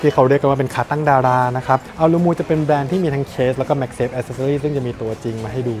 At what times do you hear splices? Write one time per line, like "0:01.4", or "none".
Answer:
0:01.9